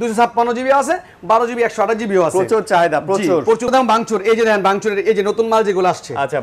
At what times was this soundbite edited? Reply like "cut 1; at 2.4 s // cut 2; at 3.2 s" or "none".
cut 1; at 3.7 s